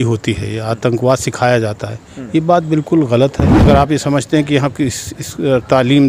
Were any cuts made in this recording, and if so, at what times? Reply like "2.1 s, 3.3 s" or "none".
3.5 s